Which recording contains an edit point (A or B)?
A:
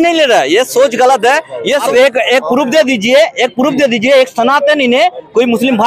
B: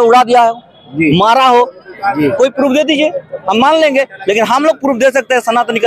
A